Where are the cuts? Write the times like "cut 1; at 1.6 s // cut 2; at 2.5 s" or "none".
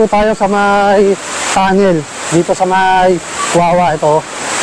none